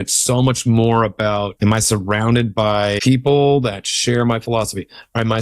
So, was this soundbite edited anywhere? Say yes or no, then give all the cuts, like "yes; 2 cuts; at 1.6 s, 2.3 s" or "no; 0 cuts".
yes; 2 cuts; at 1.5 s, 3.0 s